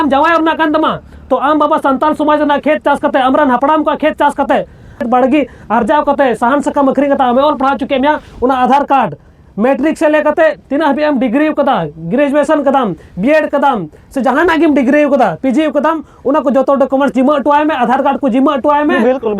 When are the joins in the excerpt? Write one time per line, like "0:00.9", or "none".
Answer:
0:05.0

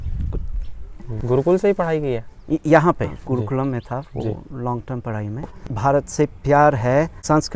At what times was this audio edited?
0:01.1
0:03.2
0:05.6

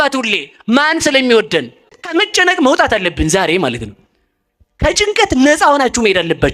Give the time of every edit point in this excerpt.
0:01.9

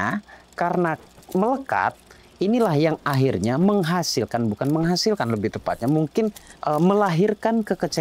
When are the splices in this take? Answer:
none

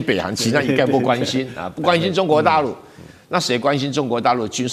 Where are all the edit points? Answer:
none

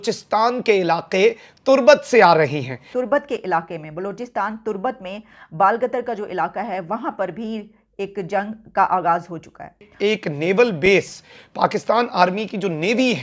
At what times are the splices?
0:02.7
0:09.9

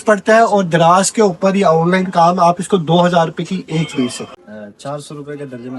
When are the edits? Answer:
0:04.2

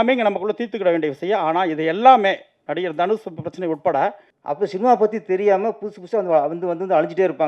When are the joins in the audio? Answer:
0:04.3

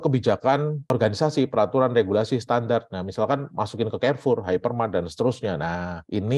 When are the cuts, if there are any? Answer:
none

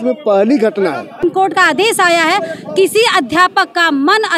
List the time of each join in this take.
0:01.2

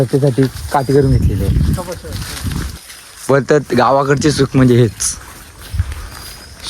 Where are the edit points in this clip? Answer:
0:02.7

